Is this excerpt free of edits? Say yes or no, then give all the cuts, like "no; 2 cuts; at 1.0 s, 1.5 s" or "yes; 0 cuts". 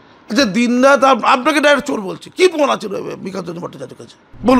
yes; 0 cuts